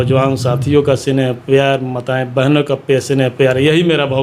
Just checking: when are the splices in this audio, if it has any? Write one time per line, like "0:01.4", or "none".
none